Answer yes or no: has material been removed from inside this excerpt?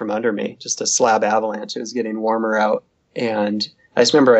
no